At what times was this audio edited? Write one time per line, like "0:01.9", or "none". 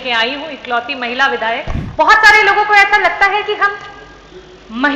0:01.8